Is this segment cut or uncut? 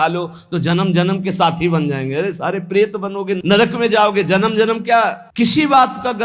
cut